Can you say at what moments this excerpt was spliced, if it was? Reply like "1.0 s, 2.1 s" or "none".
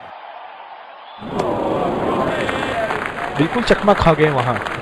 1.2 s